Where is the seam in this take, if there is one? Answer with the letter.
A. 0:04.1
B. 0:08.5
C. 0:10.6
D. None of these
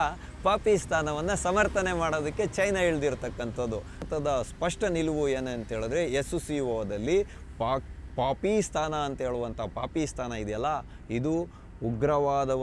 A